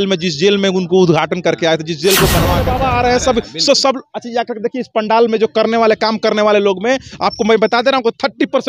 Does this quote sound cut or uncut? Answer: cut